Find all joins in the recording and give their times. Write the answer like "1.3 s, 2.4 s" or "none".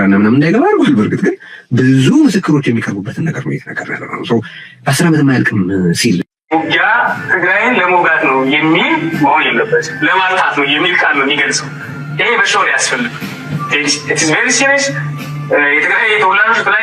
6.5 s